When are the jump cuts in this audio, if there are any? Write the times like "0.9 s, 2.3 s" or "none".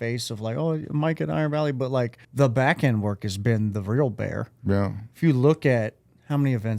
2.2 s